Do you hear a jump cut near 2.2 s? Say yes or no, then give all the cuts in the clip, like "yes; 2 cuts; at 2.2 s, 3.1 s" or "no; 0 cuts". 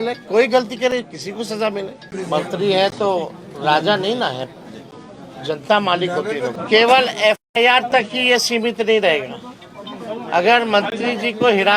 yes; 2 cuts; at 2.2 s, 6.6 s